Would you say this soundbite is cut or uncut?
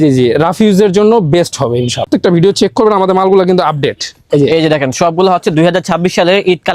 cut